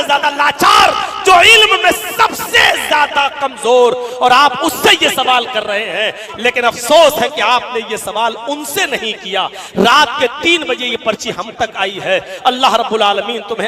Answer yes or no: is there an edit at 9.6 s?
no